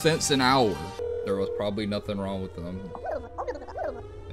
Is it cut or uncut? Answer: cut